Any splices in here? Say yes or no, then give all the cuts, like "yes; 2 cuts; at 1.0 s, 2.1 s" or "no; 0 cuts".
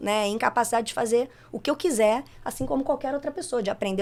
no; 0 cuts